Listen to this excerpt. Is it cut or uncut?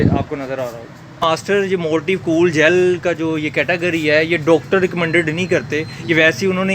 cut